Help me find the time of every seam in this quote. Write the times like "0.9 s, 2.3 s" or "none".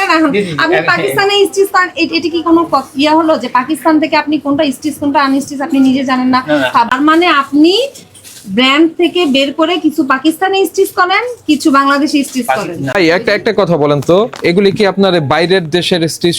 6.9 s, 12.9 s